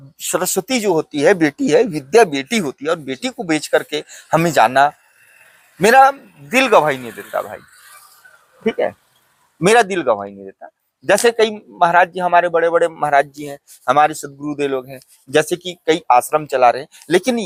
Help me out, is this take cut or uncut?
uncut